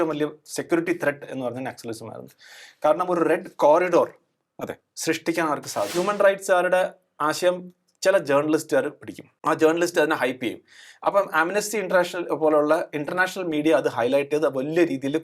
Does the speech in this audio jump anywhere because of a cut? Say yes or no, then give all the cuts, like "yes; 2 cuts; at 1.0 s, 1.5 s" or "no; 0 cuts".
yes; 1 cut; at 5.9 s